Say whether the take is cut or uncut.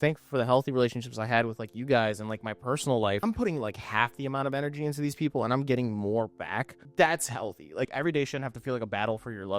cut